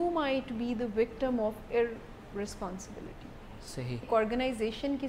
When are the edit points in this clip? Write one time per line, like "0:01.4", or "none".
0:04.1